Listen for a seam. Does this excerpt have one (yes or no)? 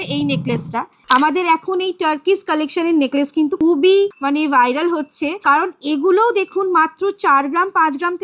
yes